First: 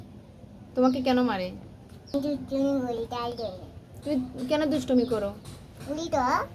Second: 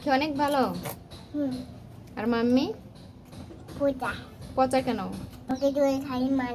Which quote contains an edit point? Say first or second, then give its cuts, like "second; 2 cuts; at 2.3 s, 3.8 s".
second; 1 cut; at 5.4 s